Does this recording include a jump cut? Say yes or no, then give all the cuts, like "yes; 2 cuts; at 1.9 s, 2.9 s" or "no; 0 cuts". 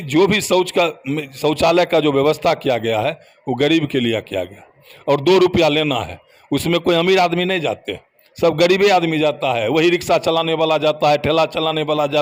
no; 0 cuts